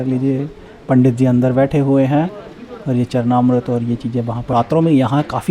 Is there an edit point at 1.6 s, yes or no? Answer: no